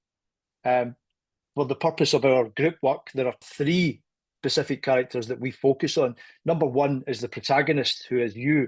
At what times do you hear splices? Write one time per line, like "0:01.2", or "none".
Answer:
0:03.4